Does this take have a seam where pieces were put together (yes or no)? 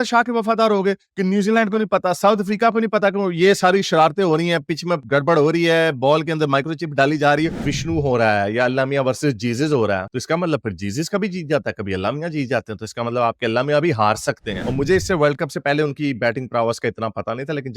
yes